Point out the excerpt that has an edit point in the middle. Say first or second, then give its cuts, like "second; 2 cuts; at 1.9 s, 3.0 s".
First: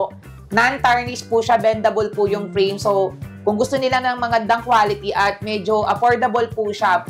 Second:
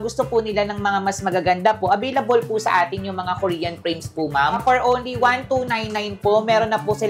second; 1 cut; at 4.6 s